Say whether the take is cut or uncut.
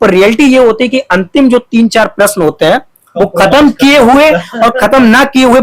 uncut